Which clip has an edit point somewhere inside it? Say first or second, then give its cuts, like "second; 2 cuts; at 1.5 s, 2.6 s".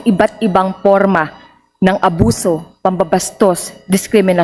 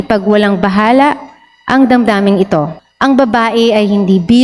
second; 1 cut; at 2.8 s